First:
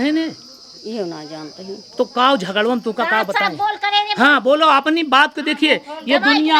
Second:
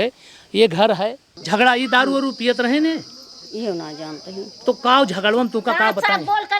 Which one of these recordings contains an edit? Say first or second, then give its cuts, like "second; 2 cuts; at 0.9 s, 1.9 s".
second; 1 cut; at 1.3 s